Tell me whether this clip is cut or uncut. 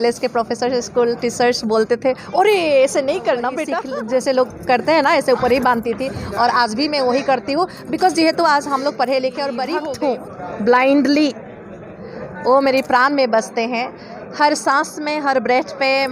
cut